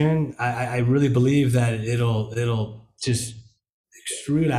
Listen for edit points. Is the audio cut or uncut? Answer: uncut